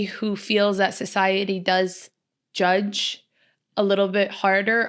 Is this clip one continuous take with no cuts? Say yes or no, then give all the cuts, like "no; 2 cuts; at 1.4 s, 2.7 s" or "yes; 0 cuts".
yes; 0 cuts